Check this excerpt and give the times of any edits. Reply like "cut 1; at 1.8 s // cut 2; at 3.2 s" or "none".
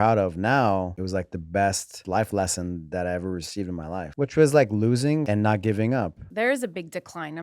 cut 1; at 1.0 s // cut 2; at 2.0 s // cut 3; at 4.1 s // cut 4; at 5.2 s // cut 5; at 6.2 s